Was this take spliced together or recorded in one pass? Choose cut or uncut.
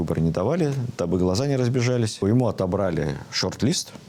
cut